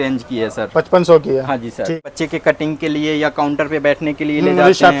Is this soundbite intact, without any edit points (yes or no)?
no